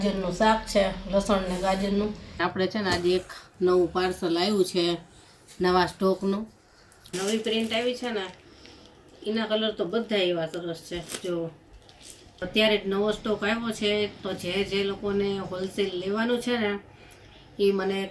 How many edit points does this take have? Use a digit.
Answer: 3